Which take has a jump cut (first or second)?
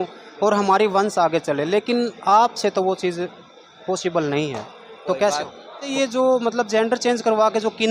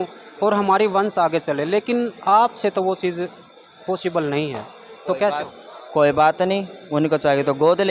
first